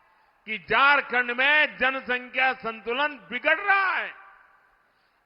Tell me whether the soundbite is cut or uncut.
uncut